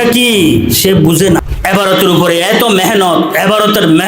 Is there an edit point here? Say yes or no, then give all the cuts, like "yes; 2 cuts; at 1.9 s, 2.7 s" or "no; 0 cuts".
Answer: yes; 1 cut; at 1.4 s